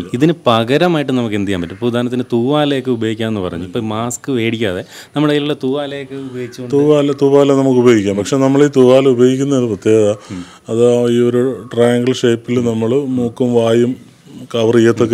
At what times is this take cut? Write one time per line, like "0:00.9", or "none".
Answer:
none